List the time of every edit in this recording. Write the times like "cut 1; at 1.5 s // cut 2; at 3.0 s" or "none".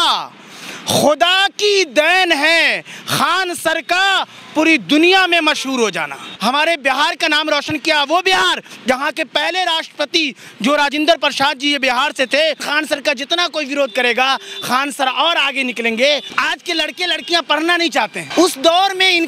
cut 1; at 6.2 s // cut 2; at 12.7 s // cut 3; at 16.3 s // cut 4; at 18.2 s